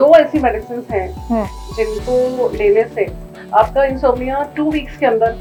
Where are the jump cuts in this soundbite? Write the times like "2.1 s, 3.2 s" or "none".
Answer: none